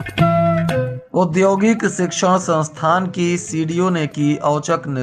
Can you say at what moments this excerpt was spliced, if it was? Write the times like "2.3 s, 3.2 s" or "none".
1.0 s